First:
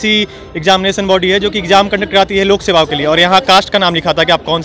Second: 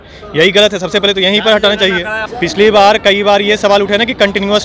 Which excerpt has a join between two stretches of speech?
second; 1 cut; at 2.2 s

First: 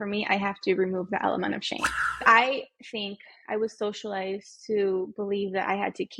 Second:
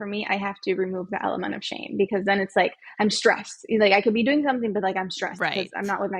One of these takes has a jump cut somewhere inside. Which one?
first; 1 cut; at 1.8 s

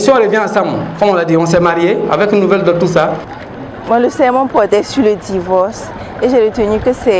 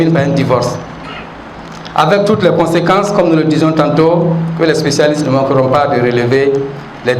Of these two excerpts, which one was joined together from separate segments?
first; 1 cut; at 3.4 s

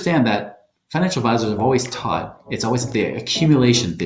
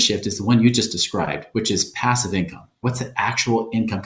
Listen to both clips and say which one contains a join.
second; 1 cut; at 2.8 s

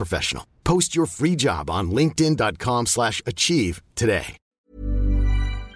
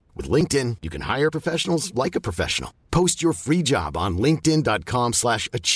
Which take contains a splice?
first; 1 cut; at 4.5 s

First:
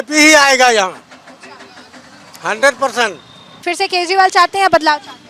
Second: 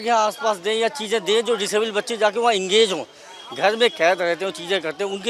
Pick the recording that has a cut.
first; 1 cut; at 3.6 s

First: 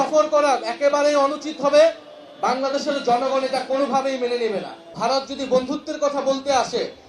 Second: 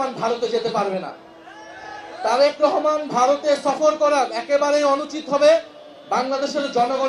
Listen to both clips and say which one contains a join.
first; 1 cut; at 4.8 s

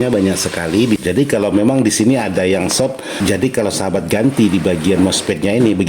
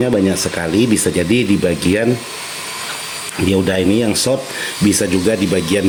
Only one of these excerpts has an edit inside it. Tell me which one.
first; 2 cuts; at 1.0 s, 3.1 s

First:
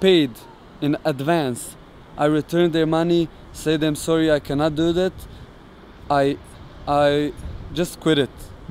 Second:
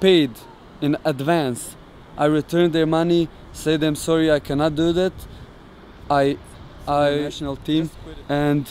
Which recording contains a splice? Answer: second; 1 cut; at 7.4 s

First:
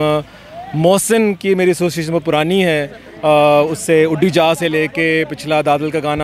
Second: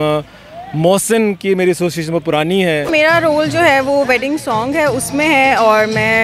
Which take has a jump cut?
second; 1 cut; at 2.9 s

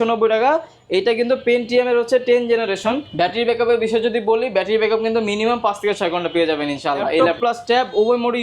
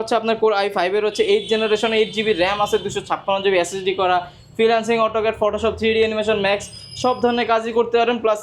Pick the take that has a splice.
first; 2 cuts; at 3.1 s, 7.3 s

